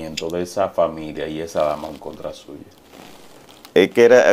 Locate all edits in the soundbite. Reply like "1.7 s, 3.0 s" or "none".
none